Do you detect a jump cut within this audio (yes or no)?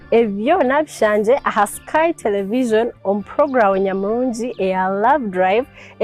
no